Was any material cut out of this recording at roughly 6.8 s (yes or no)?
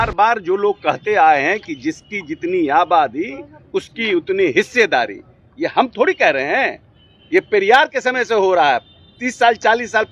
no